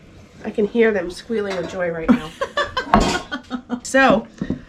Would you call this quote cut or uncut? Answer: uncut